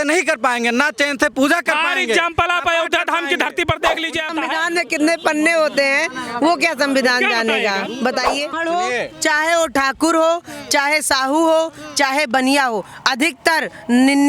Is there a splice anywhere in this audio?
yes; 2 cuts; at 4.3 s, 8.5 s

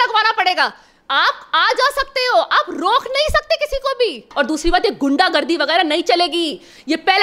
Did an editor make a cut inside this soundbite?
yes; 1 cut; at 4.3 s

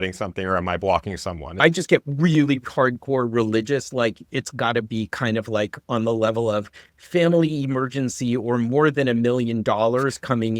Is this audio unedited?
no; 1 cut; at 1.4 s

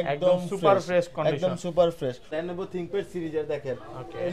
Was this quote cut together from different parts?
yes; 1 cut; at 2.3 s

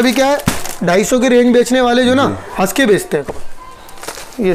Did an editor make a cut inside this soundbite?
yes; 1 cut; at 3.3 s

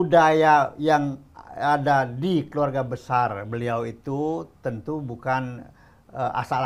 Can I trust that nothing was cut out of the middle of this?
yes; 0 cuts

